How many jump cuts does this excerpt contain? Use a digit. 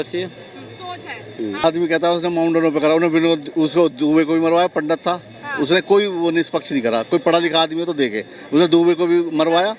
1